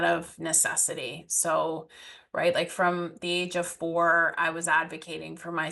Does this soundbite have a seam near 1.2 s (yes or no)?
no